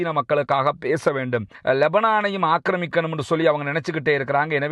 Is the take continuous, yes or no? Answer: no